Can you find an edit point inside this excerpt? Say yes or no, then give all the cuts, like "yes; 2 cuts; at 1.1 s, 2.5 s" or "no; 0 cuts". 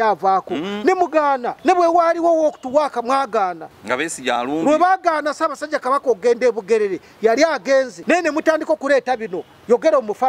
yes; 3 cuts; at 1.5 s, 3.7 s, 8.0 s